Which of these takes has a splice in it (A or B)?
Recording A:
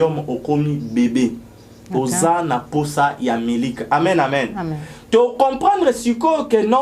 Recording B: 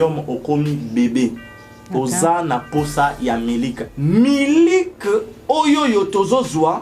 B